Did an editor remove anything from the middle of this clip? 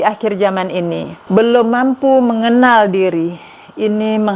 yes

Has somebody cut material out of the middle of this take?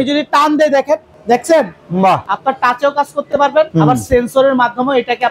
yes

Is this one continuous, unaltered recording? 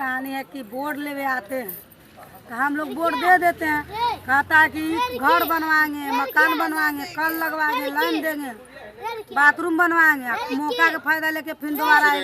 yes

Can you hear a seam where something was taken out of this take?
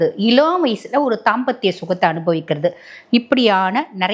no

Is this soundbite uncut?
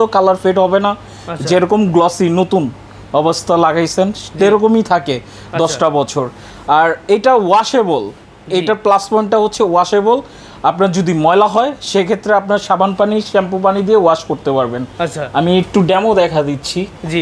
yes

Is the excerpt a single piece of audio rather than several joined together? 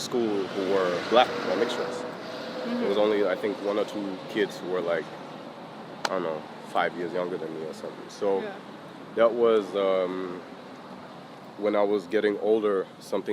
yes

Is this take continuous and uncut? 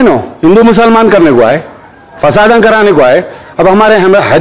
yes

